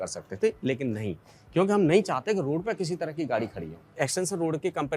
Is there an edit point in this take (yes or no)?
yes